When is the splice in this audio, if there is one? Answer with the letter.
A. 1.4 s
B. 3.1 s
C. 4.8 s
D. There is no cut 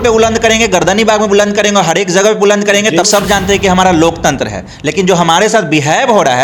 B